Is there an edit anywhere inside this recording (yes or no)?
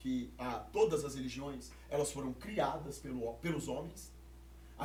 no